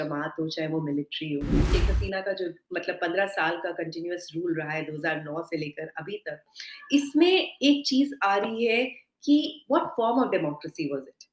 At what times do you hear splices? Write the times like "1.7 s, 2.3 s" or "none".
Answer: 1.7 s